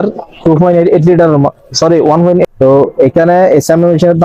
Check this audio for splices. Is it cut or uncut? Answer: cut